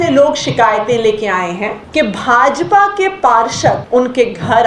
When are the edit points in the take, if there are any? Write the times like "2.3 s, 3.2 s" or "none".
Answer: 1.8 s, 3.8 s